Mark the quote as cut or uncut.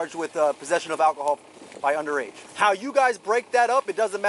cut